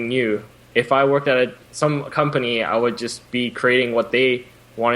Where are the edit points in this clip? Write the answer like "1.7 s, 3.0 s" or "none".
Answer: 1.6 s